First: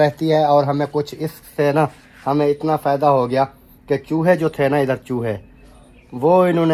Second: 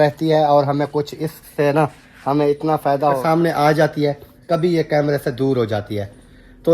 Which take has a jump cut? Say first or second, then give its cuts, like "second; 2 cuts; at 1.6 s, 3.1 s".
second; 1 cut; at 3.2 s